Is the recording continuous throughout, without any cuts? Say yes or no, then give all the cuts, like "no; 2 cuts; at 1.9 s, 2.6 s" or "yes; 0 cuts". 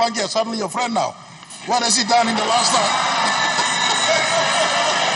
yes; 0 cuts